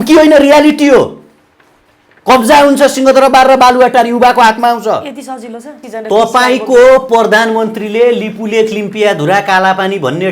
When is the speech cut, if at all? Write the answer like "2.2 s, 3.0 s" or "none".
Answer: 5.8 s